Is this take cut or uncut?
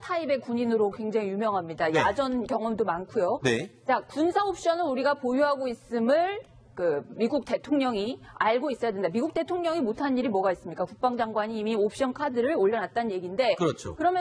cut